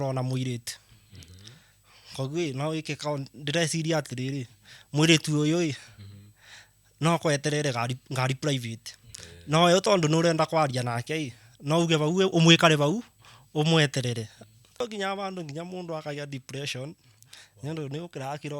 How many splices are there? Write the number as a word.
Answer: one